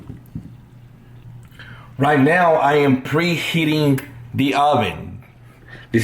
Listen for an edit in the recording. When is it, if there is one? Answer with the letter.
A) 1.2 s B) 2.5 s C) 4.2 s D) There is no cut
A